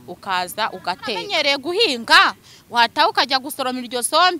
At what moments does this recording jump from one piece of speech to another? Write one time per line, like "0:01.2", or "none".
0:01.3